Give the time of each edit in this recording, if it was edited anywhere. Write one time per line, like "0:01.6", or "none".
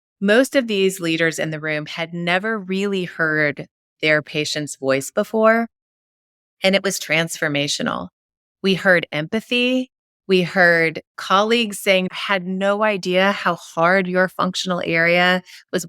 0:12.2